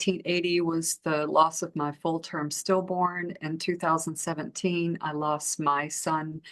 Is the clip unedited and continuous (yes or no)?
yes